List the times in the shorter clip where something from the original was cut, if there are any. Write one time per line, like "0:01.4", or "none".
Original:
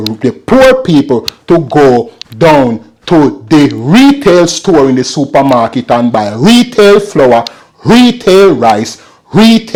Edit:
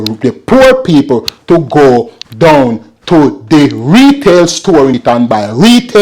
0:04.9